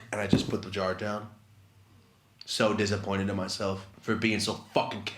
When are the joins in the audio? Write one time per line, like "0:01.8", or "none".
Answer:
0:03.9